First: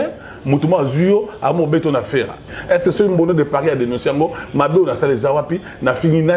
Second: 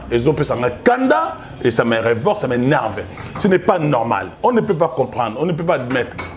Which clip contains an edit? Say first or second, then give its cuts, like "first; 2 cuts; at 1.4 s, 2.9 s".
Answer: first; 1 cut; at 2.4 s